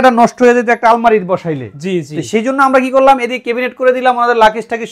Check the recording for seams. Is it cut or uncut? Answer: uncut